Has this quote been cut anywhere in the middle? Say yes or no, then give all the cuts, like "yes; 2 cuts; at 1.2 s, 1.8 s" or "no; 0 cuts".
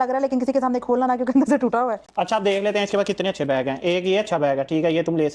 yes; 1 cut; at 2.0 s